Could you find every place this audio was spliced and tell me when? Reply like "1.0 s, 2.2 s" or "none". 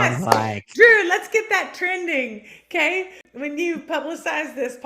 3.2 s